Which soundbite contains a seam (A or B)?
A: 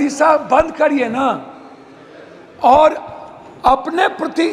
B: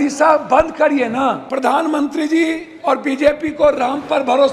B